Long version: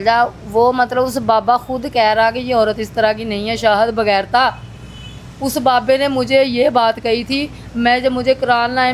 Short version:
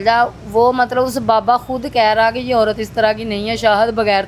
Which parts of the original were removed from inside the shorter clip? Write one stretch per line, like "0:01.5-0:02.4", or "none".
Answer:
none